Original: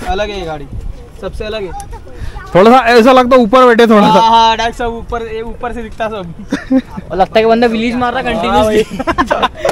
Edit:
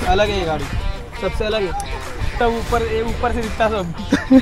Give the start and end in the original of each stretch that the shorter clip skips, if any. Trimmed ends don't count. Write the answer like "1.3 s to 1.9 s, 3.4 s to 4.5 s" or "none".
2.3 s to 4.7 s